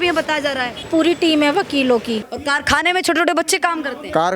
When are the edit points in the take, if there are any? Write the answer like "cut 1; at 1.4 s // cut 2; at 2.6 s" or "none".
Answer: cut 1; at 0.8 s // cut 2; at 2.3 s